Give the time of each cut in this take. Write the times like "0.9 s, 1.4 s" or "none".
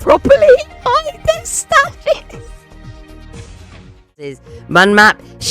4.5 s